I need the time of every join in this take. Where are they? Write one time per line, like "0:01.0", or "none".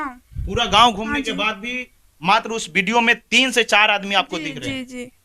none